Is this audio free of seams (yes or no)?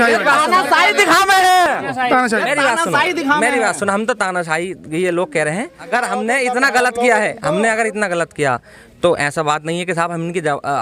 yes